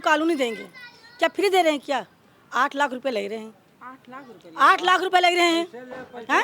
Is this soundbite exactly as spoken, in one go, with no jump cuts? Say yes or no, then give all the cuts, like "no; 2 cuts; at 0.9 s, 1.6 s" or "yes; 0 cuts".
yes; 0 cuts